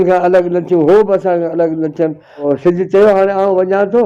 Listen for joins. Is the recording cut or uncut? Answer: cut